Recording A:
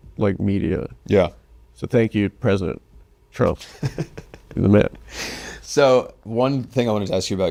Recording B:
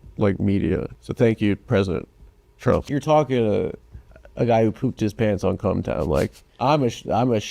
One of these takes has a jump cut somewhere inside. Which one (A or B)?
B